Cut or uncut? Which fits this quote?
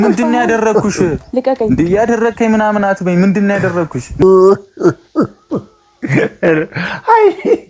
cut